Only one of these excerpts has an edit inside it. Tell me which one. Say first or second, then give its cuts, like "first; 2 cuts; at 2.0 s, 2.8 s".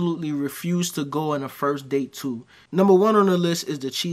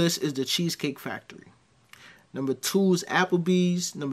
first; 1 cut; at 2.5 s